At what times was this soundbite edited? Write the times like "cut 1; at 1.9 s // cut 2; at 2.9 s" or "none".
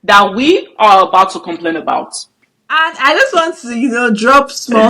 cut 1; at 2.1 s